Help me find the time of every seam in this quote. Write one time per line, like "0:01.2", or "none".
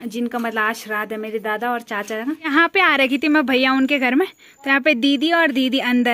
0:02.5